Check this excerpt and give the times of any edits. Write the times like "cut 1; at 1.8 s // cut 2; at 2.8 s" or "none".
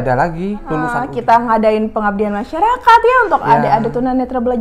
cut 1; at 1.1 s

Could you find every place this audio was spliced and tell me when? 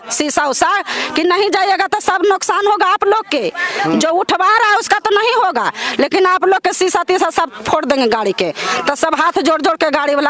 none

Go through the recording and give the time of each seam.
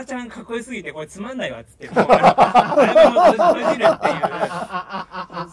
none

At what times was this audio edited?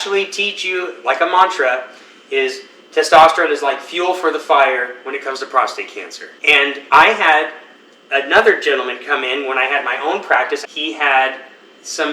cut 1; at 6.8 s // cut 2; at 10.6 s

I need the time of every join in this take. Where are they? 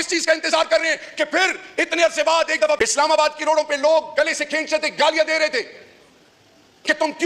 cut 1; at 2.8 s

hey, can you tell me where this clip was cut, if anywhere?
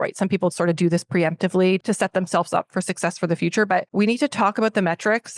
cut 1; at 1.8 s // cut 2; at 3.9 s

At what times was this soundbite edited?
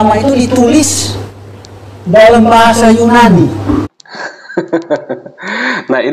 none

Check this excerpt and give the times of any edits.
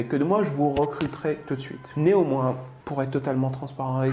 cut 1; at 1.8 s // cut 2; at 2.7 s

